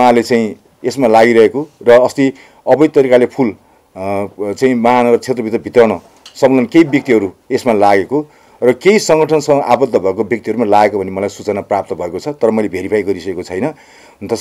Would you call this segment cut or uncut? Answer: uncut